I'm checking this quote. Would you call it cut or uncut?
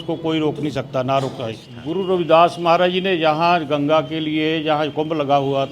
cut